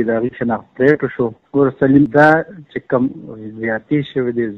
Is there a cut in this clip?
yes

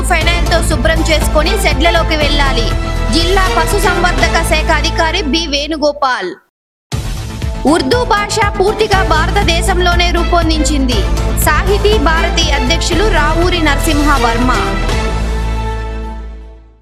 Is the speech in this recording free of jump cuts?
yes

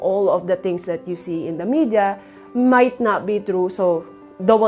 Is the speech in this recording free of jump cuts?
yes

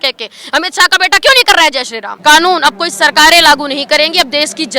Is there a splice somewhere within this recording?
yes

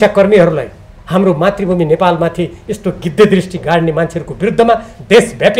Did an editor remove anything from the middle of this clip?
no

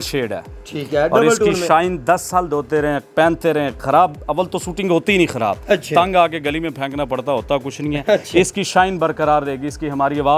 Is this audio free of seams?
yes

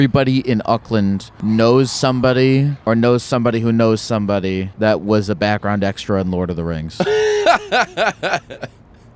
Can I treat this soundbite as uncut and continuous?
no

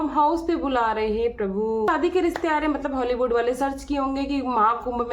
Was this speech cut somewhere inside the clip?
yes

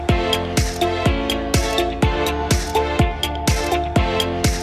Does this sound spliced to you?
no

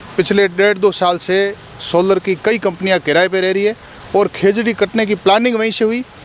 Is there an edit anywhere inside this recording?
no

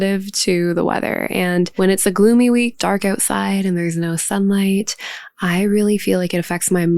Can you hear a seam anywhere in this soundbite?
yes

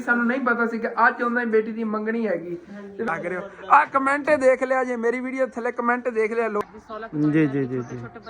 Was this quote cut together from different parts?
yes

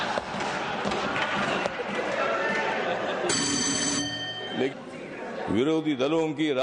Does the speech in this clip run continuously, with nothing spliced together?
no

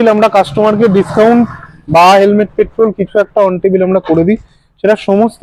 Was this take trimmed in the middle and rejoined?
no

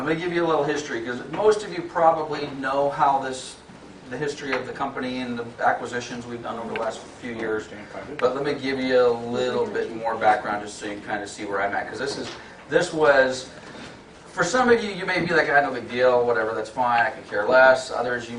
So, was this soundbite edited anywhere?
yes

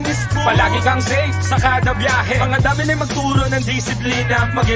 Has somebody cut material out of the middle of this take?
no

